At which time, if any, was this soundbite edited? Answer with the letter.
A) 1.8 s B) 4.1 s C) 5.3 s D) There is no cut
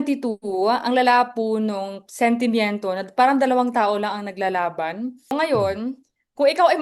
C